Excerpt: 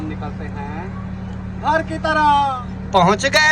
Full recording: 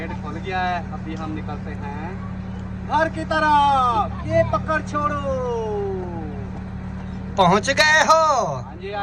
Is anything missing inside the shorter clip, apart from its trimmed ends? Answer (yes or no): yes